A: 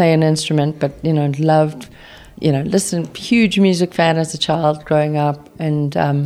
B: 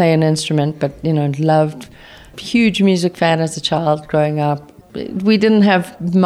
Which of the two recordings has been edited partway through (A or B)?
B